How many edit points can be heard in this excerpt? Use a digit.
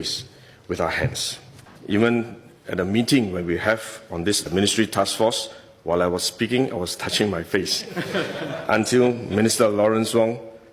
1